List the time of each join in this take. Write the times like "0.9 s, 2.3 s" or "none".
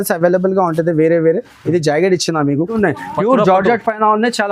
2.8 s